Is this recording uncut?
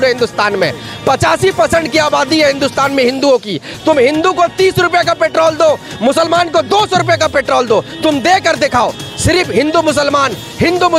yes; 0 cuts

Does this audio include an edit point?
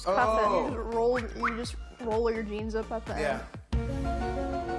no; 0 cuts

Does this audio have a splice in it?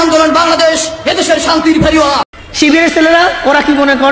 yes; 1 cut; at 2.4 s

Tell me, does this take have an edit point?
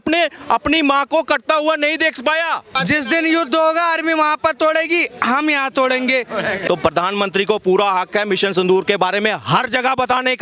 yes; 2 cuts; at 2.7 s, 6.7 s

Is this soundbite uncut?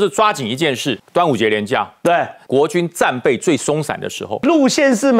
no; 3 cuts; at 1.0 s, 2.4 s, 4.4 s

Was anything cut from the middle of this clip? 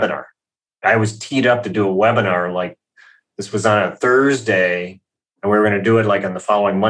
no; 0 cuts

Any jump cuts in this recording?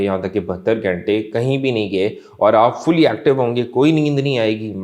no; 0 cuts

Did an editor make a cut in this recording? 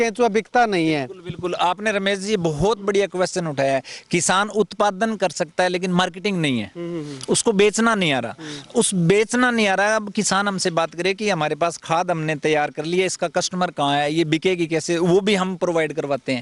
no; 0 cuts

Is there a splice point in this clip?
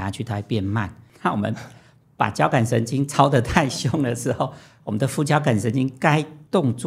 yes; 1 cut; at 1.0 s

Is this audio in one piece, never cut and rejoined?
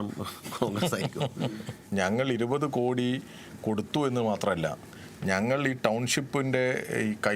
no; 1 cut; at 1.8 s

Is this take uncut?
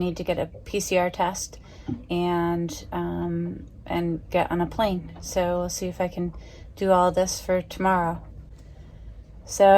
yes; 0 cuts

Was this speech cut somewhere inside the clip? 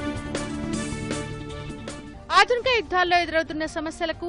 yes; 1 cut; at 2.1 s

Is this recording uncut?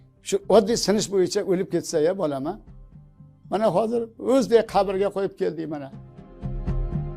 no; 1 cut; at 6.2 s

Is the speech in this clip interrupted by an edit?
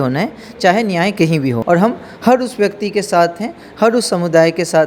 yes; 1 cut; at 1.6 s

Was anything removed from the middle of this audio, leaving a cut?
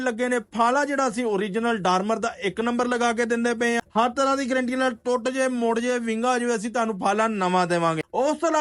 no; 0 cuts

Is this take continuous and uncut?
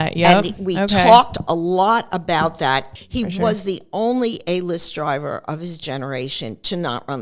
no; 1 cut; at 2.9 s

